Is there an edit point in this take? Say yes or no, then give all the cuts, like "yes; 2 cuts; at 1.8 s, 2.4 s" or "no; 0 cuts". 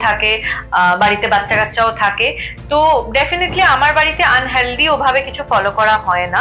no; 0 cuts